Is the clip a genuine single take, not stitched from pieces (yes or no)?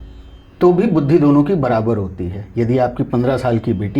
yes